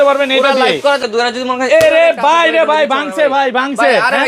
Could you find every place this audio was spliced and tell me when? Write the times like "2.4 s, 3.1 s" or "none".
1.0 s